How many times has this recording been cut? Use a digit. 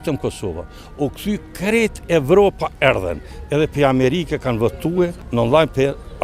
1